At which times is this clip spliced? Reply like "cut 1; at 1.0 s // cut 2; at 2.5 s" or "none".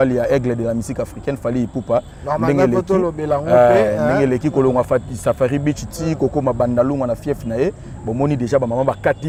none